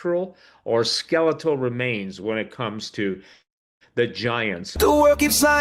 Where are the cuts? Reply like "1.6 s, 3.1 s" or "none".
4.6 s